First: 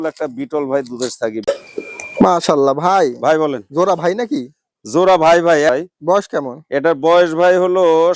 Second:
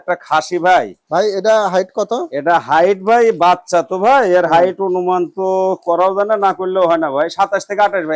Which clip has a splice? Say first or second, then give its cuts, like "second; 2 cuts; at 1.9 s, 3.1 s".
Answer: first; 2 cuts; at 1.4 s, 5.7 s